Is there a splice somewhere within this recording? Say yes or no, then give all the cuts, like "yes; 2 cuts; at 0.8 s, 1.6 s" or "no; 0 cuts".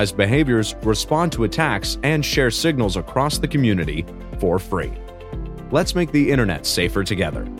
no; 0 cuts